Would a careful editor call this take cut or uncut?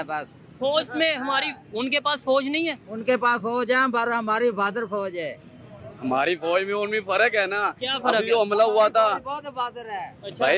uncut